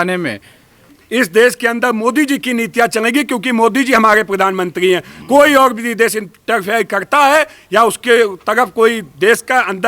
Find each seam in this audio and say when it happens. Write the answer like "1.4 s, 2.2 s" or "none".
1.0 s